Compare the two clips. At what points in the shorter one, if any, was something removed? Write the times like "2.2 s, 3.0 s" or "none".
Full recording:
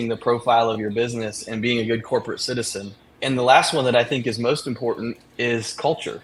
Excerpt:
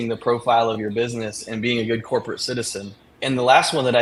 none